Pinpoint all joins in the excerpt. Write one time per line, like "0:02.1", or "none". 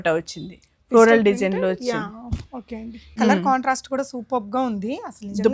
0:03.1